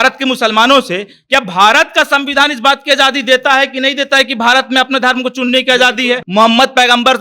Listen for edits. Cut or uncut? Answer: cut